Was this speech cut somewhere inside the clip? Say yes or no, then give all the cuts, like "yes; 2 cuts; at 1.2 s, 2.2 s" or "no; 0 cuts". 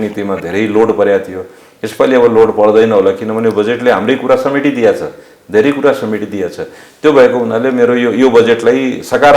no; 0 cuts